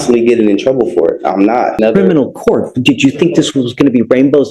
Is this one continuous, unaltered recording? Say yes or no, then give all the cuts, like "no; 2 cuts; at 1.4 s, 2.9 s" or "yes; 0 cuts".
no; 1 cut; at 1.8 s